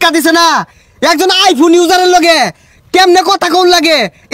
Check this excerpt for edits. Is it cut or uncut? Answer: uncut